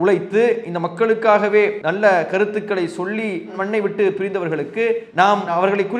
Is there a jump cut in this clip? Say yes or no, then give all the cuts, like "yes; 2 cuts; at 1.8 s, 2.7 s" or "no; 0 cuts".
yes; 1 cut; at 1.8 s